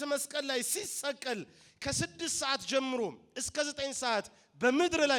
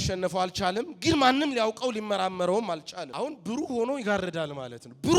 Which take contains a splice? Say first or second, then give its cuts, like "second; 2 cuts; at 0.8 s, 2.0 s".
second; 1 cut; at 3.0 s